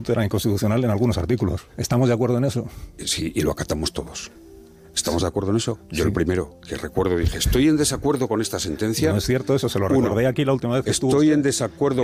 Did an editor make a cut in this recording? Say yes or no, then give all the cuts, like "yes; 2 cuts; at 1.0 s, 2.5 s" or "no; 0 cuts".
no; 0 cuts